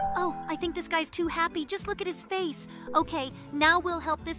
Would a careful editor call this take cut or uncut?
uncut